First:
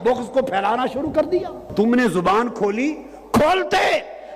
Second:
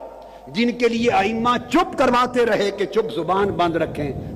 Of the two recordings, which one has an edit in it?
first; 1 cut; at 1.7 s

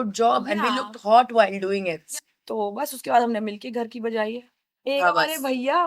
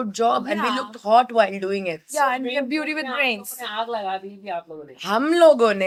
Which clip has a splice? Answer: first; 2 cuts; at 2.0 s, 4.8 s

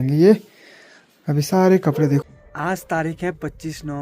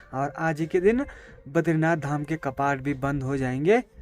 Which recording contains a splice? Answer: first; 1 cut; at 2.2 s

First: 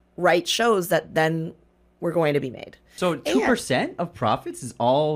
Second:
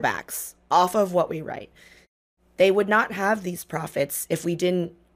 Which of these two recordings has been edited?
first; 1 cut; at 2.9 s

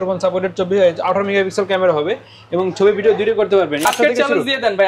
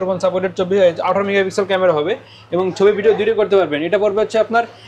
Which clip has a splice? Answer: first; 1 cut; at 3.8 s

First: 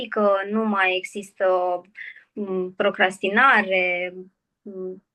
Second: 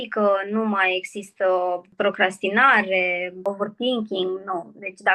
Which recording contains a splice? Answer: second; 2 cuts; at 1.9 s, 3.4 s

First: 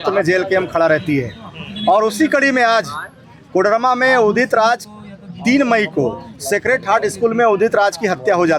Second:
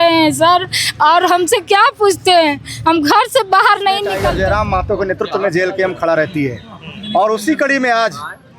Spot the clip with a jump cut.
second; 1 cut; at 4.2 s

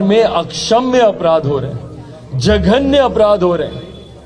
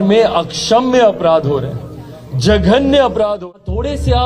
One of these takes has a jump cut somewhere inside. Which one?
second; 1 cut; at 3.3 s

